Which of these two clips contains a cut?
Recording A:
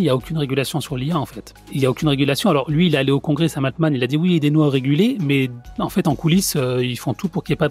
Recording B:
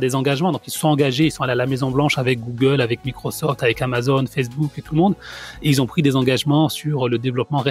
A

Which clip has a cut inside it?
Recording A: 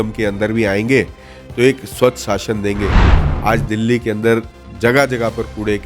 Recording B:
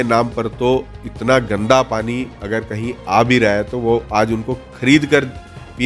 A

